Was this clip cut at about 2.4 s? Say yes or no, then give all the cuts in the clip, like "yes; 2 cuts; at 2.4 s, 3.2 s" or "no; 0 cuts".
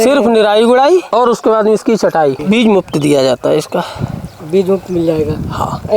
yes; 1 cut; at 2.4 s